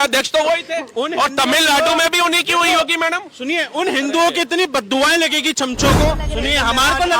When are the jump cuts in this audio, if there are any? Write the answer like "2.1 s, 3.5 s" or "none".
6.2 s

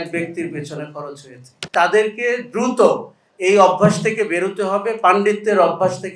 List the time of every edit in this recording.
1.7 s

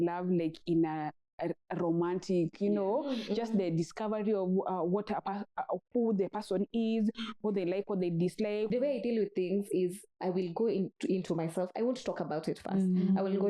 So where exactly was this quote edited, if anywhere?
8.7 s

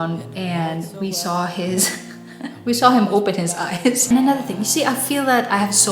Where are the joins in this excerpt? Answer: 4.1 s

